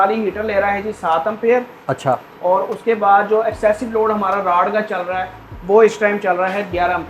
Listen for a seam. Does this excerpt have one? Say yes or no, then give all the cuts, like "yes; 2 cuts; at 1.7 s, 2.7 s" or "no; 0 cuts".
no; 0 cuts